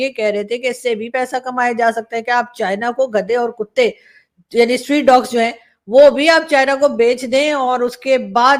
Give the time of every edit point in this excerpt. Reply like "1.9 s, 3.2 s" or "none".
none